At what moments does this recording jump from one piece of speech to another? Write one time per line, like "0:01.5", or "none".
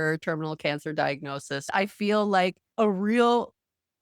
0:01.7
0:02.6